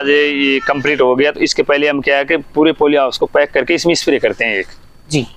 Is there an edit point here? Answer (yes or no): no